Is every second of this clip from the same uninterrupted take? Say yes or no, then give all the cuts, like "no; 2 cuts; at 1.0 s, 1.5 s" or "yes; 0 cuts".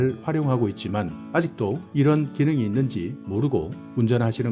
yes; 0 cuts